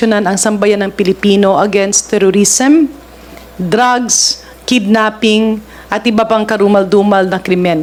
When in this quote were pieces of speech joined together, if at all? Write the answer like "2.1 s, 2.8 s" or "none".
none